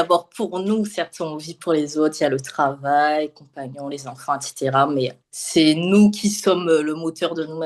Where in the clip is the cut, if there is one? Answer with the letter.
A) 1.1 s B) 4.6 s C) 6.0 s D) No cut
D